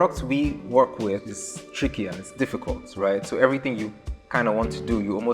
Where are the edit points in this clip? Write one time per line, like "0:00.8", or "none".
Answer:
0:01.2

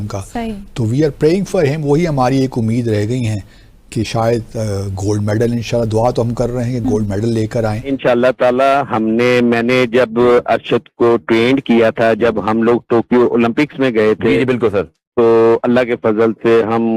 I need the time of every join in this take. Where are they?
0:07.8

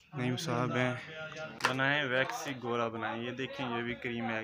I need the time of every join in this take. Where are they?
0:01.4

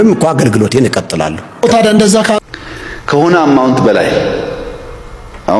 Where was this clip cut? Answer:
0:02.4

